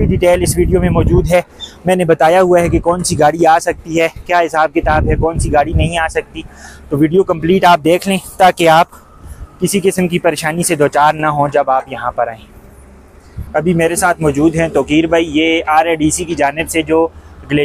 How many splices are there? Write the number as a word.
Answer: zero